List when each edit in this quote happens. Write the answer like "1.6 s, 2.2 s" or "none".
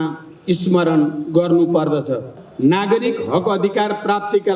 2.4 s